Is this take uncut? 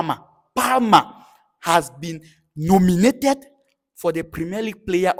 yes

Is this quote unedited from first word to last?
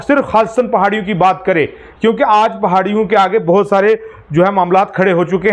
yes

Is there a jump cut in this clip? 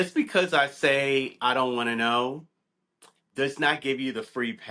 no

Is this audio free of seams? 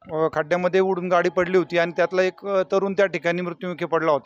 yes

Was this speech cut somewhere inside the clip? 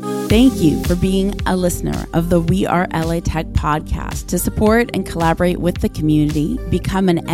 no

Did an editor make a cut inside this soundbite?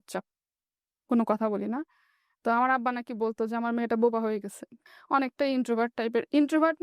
no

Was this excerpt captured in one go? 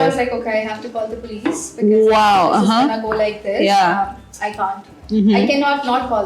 yes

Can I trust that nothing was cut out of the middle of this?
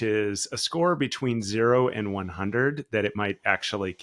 yes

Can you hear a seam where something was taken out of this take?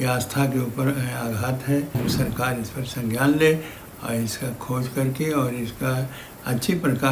yes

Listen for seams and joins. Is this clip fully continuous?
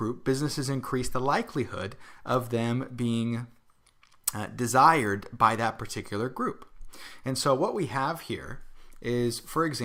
yes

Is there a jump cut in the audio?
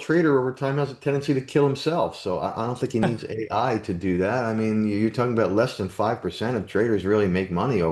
no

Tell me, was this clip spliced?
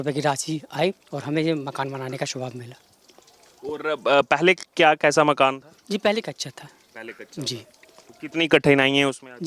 no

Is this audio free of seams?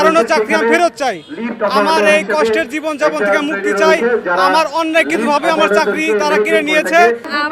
yes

